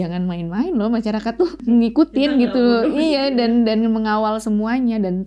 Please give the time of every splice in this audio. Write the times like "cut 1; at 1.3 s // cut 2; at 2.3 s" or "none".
cut 1; at 1.7 s